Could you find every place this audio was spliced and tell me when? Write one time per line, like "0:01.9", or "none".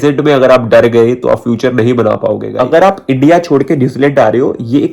0:02.5